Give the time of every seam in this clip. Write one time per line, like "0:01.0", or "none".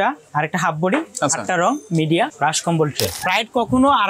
0:03.1